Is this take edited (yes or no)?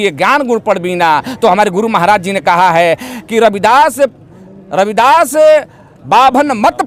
no